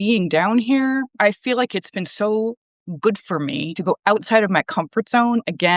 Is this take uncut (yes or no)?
no